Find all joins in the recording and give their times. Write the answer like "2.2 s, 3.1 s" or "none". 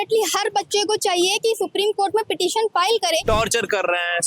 3.2 s

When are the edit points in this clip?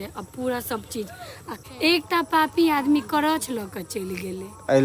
1.5 s

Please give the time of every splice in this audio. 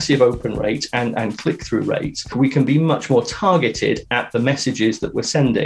2.3 s

